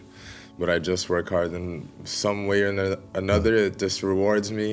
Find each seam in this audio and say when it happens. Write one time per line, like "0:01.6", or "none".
none